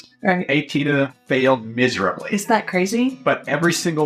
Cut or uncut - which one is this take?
cut